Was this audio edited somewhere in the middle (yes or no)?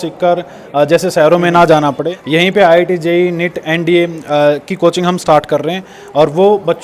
yes